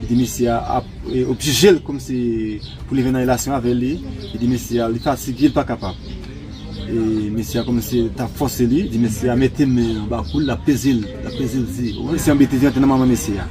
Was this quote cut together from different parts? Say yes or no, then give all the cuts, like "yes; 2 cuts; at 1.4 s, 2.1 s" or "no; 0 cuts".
yes; 1 cut; at 12.2 s